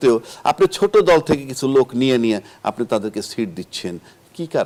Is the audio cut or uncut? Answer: uncut